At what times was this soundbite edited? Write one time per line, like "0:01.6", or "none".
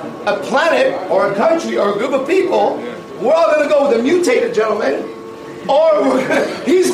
none

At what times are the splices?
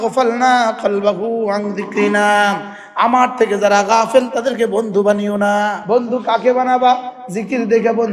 0:05.8

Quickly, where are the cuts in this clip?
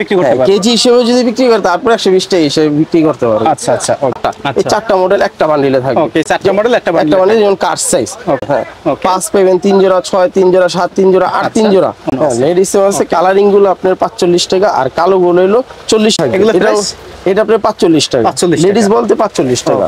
0:04.2
0:08.4
0:12.1
0:16.2

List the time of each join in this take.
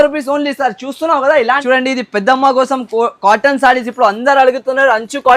0:01.6

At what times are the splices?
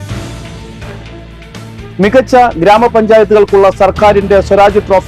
0:01.0

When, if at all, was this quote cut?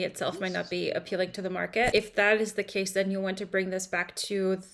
0:01.9

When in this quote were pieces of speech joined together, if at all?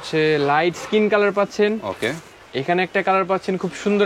none

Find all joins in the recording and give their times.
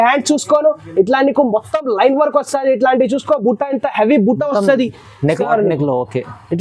0:05.4

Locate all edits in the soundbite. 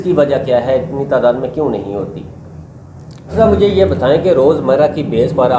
0:03.3

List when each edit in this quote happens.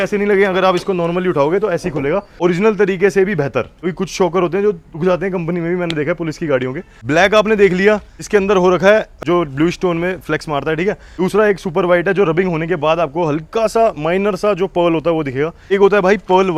none

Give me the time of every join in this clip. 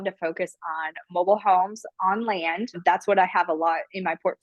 0:02.7

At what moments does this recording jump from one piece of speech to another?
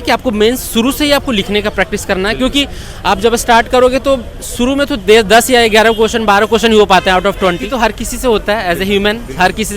0:07.7

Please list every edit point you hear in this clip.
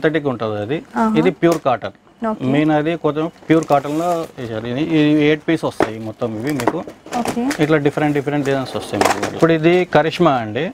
0:09.4

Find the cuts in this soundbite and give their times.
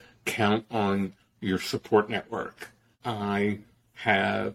0:02.9

